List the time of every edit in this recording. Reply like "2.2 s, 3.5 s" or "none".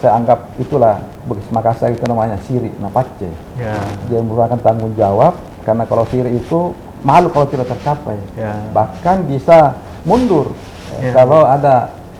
1.1 s